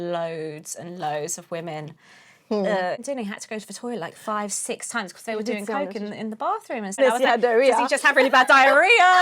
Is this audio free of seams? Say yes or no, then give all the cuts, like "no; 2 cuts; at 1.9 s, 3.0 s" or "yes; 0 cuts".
no; 2 cuts; at 3.0 s, 7.0 s